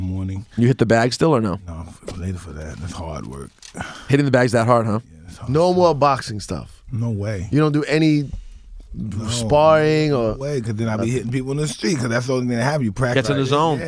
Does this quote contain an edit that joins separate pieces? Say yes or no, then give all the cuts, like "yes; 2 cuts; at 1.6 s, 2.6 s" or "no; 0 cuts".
yes; 1 cut; at 11.4 s